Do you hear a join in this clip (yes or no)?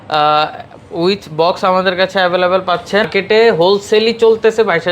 yes